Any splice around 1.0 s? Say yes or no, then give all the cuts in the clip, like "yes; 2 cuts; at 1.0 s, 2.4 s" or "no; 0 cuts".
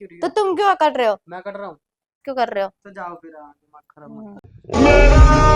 no; 2 cuts; at 2.2 s, 4.4 s